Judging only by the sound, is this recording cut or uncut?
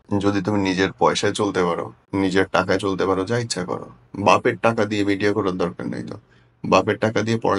cut